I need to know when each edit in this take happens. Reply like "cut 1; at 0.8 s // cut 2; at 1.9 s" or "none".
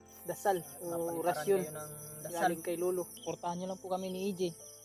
cut 1; at 3.2 s